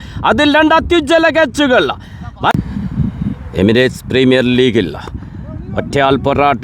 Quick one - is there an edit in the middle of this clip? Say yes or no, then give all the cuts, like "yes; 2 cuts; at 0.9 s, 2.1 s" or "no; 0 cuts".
yes; 1 cut; at 2.5 s